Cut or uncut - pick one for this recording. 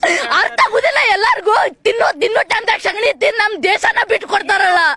uncut